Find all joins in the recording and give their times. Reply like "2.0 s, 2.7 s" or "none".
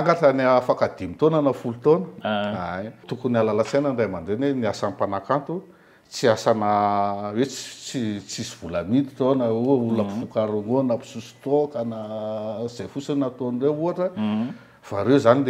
3.1 s